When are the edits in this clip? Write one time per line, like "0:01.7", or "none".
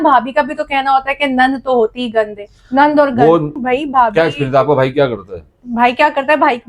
0:03.6

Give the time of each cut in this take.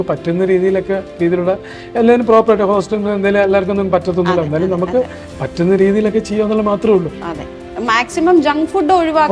none

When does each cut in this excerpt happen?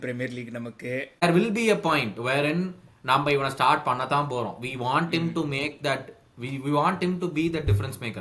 0:01.2

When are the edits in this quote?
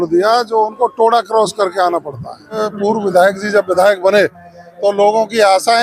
0:02.6

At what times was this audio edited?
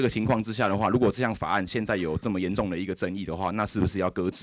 none

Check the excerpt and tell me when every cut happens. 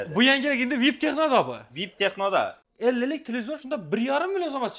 0:02.6

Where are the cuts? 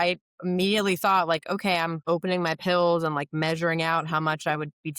0:02.0

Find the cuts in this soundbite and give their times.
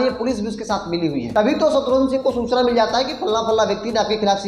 0:01.3

